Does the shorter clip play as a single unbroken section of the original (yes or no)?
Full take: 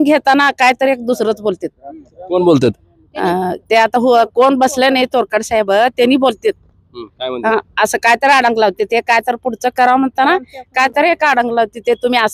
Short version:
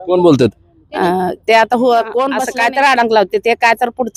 no